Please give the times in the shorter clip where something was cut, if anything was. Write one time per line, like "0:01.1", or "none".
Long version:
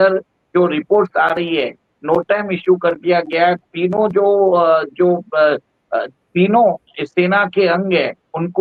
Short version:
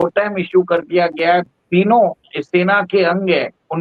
0:01.5